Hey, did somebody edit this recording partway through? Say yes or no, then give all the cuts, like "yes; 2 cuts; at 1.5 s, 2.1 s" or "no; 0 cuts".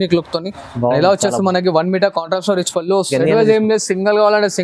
yes; 1 cut; at 3.1 s